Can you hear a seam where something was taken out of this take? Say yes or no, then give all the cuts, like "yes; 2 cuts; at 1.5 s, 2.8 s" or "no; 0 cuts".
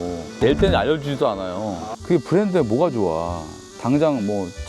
yes; 1 cut; at 1.9 s